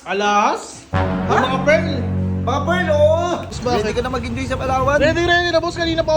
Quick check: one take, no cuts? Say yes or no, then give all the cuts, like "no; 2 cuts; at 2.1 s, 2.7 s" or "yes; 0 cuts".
no; 1 cut; at 3.6 s